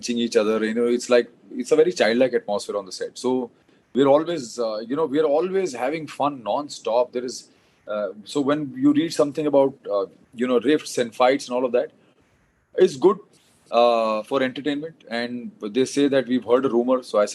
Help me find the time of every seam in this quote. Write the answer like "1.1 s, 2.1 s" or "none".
none